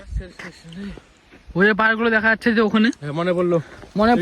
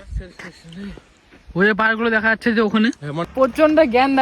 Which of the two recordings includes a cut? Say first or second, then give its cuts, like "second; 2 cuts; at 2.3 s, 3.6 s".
second; 1 cut; at 3.3 s